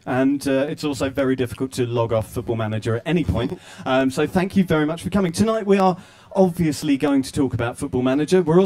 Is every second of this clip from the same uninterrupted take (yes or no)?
no